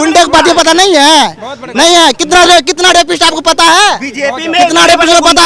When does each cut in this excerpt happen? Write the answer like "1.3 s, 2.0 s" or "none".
none